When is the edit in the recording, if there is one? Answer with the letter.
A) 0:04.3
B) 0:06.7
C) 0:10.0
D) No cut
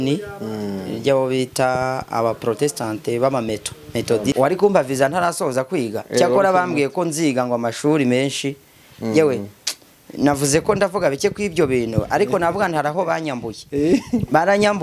A